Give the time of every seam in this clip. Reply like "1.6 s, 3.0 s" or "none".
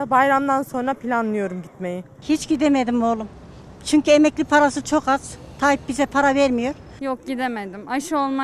2.2 s, 6.9 s

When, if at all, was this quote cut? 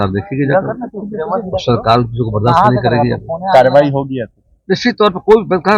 none

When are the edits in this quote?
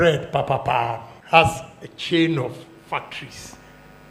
1.1 s

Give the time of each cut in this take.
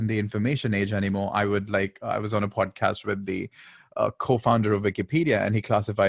none

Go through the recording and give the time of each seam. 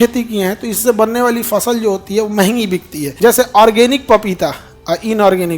3.0 s

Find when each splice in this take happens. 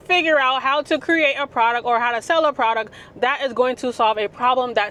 none

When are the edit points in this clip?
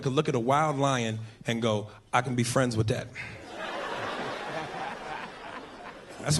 none

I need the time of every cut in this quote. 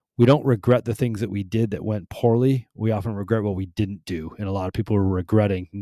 none

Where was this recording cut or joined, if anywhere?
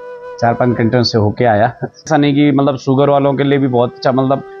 2.1 s

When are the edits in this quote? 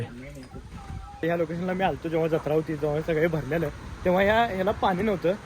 1.2 s

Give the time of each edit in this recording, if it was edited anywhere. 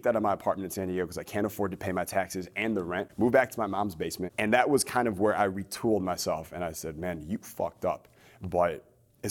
3.1 s, 4.2 s

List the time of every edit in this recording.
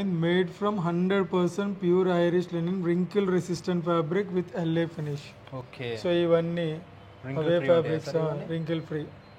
none

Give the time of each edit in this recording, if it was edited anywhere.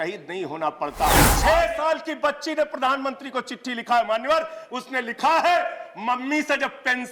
1.3 s

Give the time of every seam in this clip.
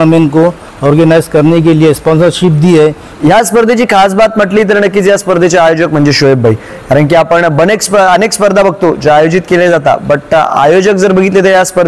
3.2 s

